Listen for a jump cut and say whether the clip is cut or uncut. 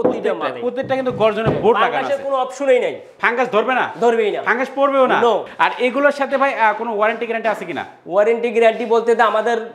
cut